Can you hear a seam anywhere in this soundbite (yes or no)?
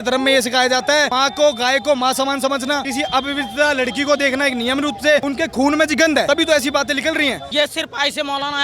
yes